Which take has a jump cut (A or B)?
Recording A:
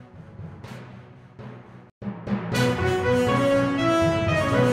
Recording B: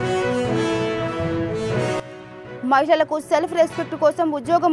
B